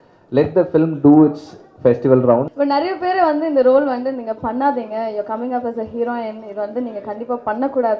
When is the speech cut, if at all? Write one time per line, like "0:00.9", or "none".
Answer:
0:02.5